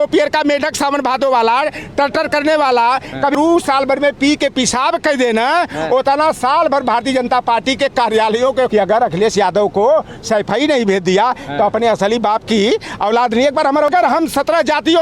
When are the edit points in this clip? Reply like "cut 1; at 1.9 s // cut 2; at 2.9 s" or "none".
cut 1; at 3.3 s // cut 2; at 8.7 s // cut 3; at 13.9 s